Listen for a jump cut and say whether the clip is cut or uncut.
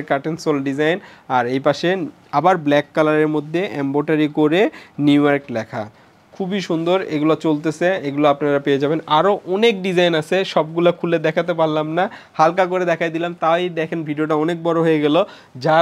uncut